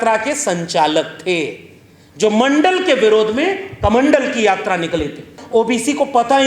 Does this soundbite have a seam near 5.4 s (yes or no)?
yes